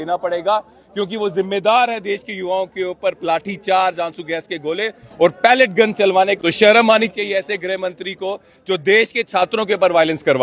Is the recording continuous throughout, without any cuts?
no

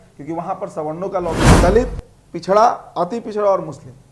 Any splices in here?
yes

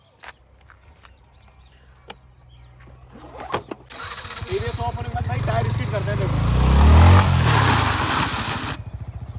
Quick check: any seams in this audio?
yes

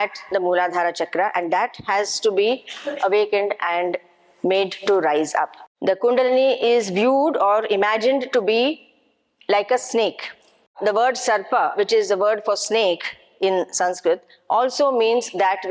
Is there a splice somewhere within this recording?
yes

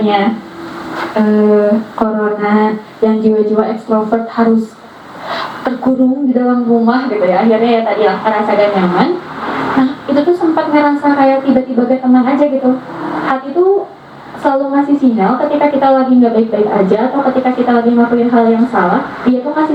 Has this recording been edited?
no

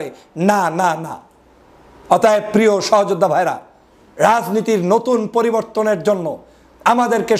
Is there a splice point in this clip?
no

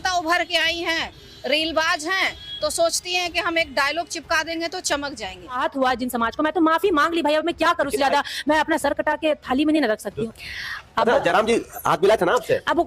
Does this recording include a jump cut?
yes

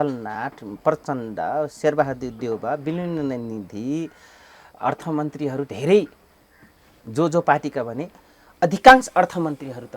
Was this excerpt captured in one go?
yes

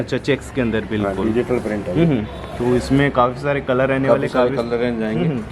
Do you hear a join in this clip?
no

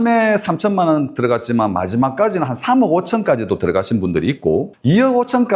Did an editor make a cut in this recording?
no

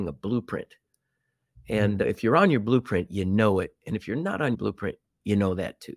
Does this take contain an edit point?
yes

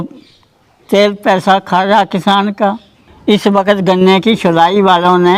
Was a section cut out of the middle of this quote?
yes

